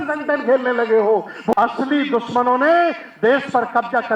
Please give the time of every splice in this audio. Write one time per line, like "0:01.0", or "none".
0:01.5